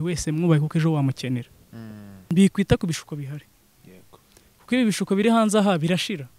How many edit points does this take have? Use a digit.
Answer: 1